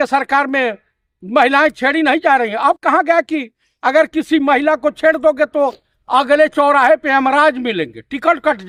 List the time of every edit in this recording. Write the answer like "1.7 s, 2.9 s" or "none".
none